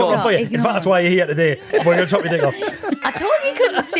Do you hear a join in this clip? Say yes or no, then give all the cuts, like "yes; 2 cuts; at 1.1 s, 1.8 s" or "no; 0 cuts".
yes; 2 cuts; at 1.6 s, 3.0 s